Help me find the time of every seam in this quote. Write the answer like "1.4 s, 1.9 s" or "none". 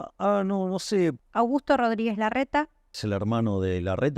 1.2 s, 3.0 s